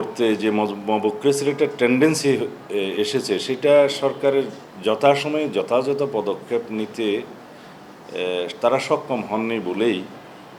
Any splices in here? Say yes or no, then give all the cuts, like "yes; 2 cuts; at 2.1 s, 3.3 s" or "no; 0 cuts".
no; 0 cuts